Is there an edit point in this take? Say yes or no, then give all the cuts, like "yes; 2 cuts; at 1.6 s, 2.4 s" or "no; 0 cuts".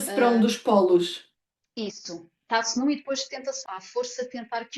yes; 1 cut; at 3.6 s